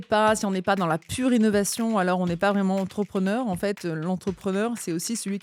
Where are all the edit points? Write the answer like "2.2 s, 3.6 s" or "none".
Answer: none